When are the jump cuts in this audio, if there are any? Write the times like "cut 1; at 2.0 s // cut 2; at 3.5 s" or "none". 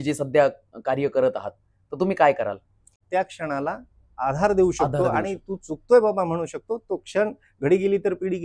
cut 1; at 2.9 s